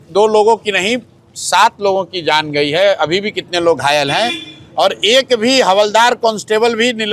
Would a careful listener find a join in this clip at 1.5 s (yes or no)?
no